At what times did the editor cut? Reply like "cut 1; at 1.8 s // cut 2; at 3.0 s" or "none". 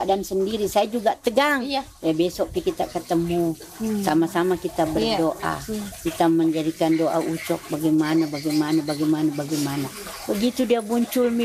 none